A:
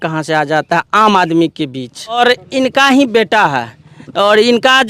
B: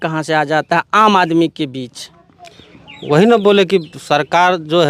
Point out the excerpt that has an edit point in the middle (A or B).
A